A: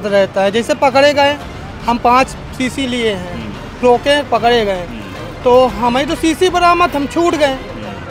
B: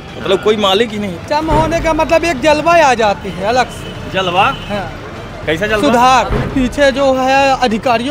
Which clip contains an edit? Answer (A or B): B